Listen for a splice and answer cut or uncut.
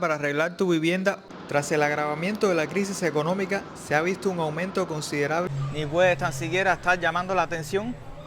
cut